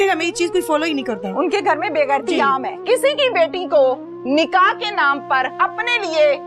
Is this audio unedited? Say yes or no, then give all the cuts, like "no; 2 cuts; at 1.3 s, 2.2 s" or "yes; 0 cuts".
no; 2 cuts; at 2.8 s, 5.5 s